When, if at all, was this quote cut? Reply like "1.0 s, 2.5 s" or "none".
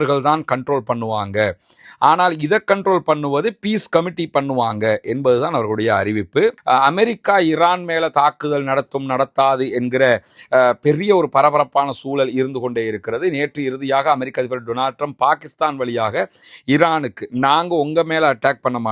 6.6 s